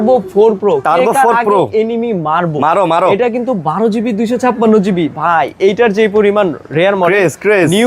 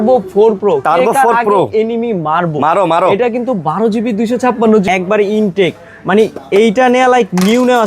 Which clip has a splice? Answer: second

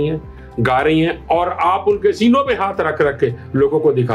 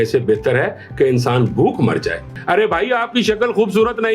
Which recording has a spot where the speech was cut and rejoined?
second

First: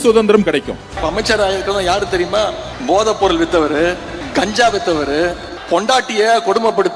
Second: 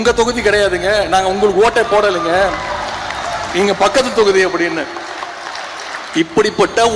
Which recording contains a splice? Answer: first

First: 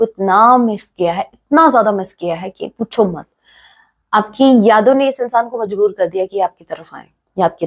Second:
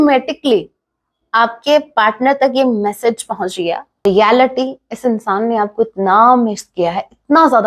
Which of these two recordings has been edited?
second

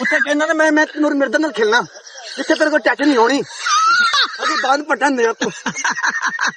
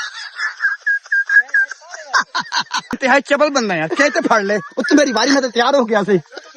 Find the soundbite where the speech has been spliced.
second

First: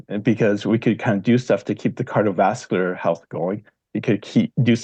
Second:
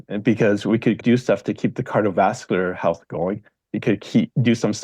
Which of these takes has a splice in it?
second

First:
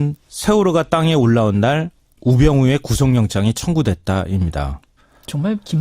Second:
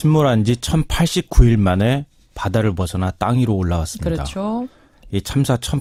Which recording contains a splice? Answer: first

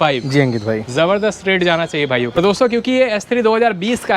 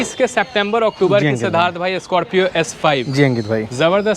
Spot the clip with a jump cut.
first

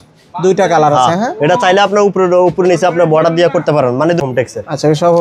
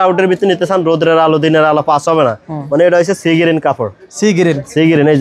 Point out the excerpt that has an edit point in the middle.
first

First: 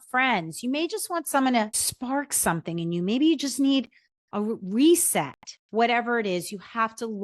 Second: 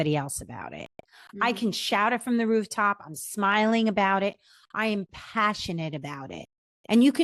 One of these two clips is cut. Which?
first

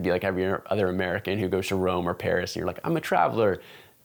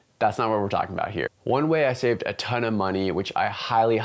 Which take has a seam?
second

